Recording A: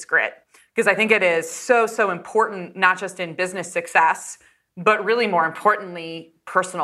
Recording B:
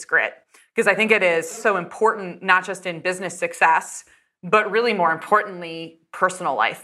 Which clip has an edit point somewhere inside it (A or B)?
B